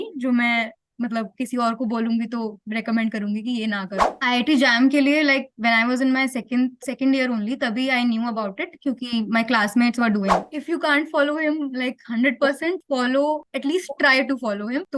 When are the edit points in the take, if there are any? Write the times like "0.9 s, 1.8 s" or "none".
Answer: 4.1 s, 10.5 s

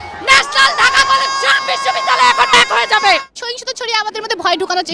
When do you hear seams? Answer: 3.3 s

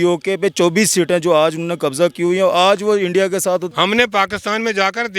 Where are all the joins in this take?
3.7 s

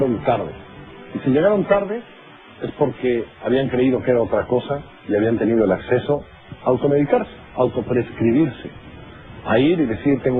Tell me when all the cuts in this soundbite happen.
none

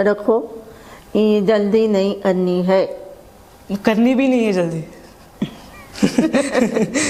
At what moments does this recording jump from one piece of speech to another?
none

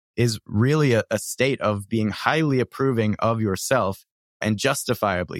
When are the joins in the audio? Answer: 4.4 s

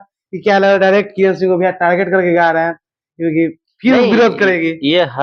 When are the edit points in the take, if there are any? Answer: none

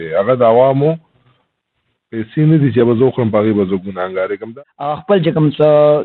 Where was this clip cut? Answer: 4.5 s

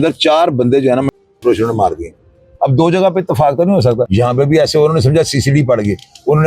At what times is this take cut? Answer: 2.5 s, 4.1 s

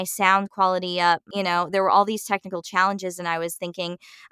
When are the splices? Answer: 1.3 s

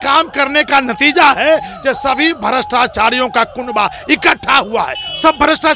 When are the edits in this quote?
none

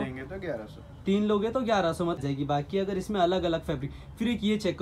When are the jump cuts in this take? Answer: 2.2 s

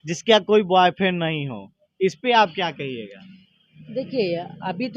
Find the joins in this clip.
none

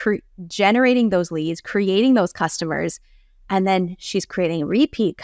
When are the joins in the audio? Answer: none

